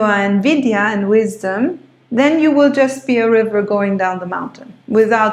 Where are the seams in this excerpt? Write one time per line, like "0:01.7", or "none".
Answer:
none